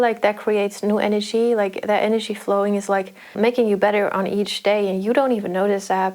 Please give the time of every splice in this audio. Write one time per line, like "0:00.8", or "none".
0:03.3